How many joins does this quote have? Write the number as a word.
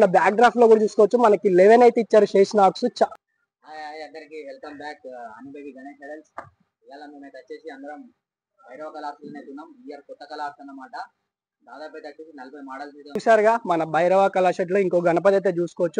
two